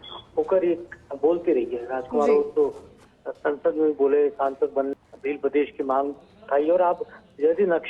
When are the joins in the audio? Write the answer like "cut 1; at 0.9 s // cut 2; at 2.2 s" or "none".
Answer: cut 1; at 4.9 s